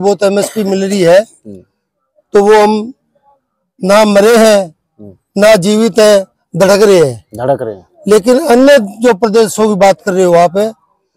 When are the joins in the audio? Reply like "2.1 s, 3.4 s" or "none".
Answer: none